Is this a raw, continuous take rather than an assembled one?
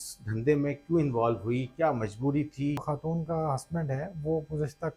no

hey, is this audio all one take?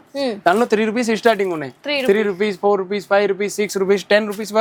yes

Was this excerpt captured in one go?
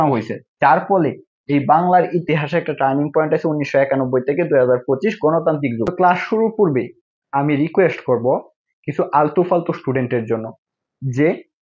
no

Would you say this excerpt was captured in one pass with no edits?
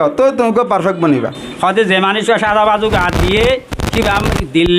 no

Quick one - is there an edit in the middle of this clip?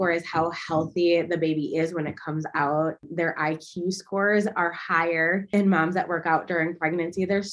yes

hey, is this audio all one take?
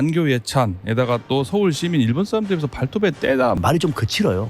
no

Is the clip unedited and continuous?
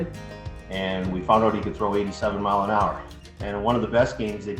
no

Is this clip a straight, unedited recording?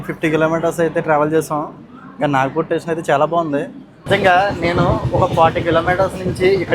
no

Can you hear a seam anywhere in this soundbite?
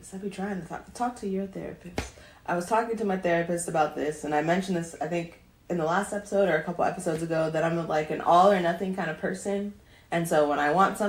no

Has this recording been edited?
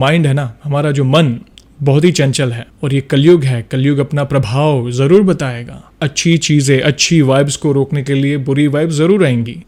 no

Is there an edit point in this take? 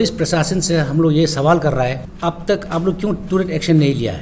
yes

